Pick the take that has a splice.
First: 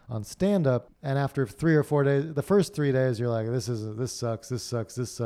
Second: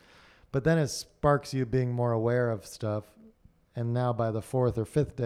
first; 1 cut; at 0.9 s

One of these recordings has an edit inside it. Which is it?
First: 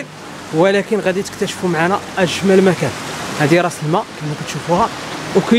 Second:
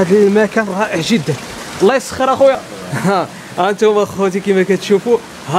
second; 1 cut; at 2.7 s

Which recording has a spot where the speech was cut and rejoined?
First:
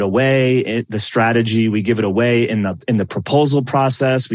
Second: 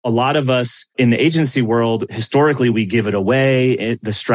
second; 2 cuts; at 0.9 s, 2.2 s

